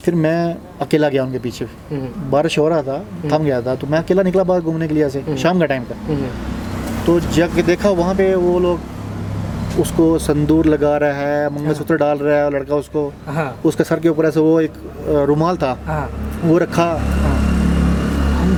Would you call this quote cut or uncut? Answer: uncut